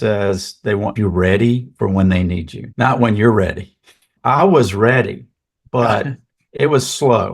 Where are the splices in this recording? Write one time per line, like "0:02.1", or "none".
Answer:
0:01.0
0:06.4

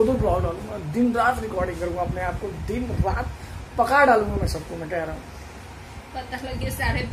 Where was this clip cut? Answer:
none

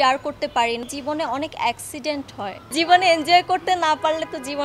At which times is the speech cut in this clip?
0:00.8
0:02.7

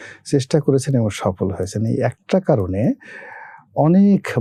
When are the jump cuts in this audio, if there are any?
none

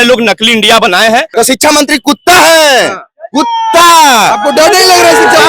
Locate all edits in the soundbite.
0:01.3

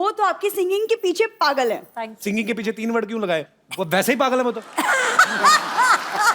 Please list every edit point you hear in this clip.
none

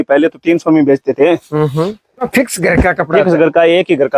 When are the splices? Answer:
0:02.3

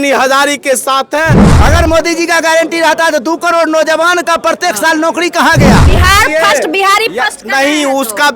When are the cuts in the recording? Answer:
0:01.5
0:05.8

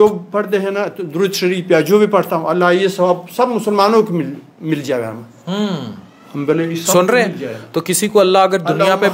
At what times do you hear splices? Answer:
none

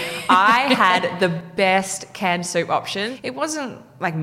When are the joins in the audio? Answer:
0:03.1

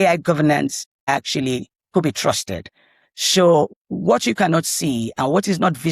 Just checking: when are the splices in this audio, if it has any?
0:01.0
0:03.7

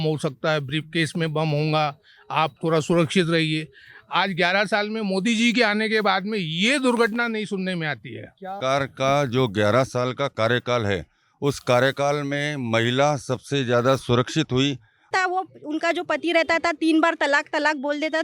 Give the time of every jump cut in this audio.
0:08.6
0:15.1

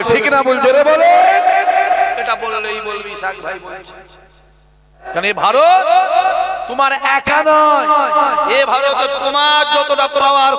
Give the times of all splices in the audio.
0:05.0

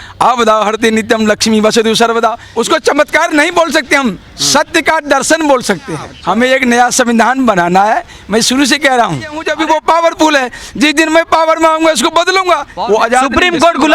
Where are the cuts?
0:02.4
0:06.1
0:09.4
0:12.7

